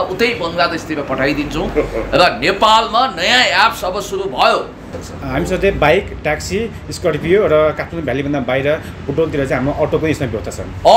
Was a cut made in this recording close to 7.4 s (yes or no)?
no